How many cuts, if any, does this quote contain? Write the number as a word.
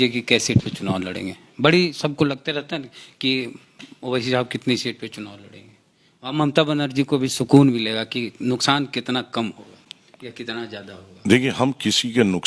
zero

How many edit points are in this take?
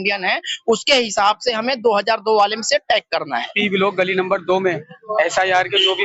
one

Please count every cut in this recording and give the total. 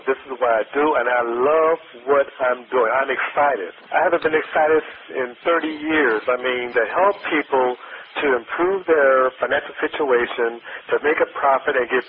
three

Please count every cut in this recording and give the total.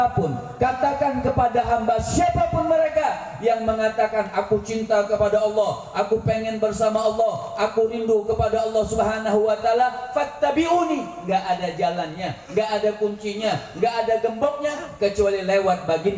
zero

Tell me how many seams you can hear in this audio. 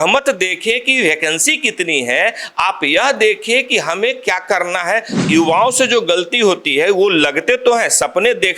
one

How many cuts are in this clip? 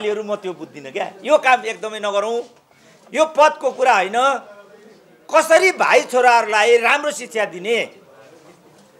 zero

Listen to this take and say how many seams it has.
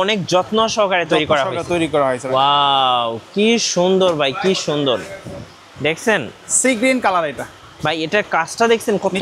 one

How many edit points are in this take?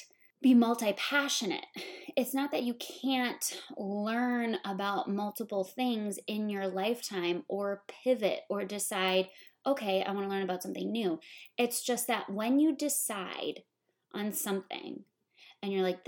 zero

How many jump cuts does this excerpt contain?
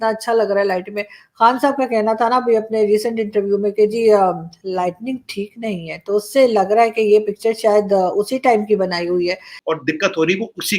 one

